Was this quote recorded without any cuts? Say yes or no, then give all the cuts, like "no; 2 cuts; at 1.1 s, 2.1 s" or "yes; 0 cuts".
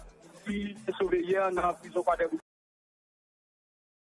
yes; 0 cuts